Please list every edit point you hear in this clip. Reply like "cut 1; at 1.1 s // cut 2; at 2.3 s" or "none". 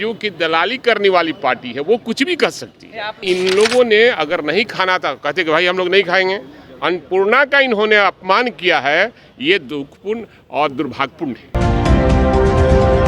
cut 1; at 3.2 s // cut 2; at 11.5 s